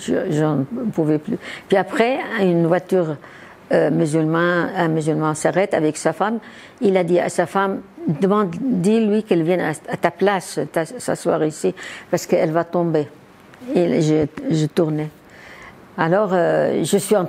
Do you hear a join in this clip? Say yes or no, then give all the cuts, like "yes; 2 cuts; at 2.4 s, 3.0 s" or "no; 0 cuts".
no; 0 cuts